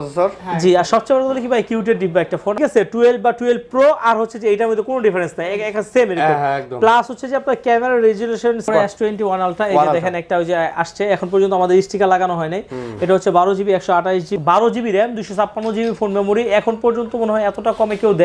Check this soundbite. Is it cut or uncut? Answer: cut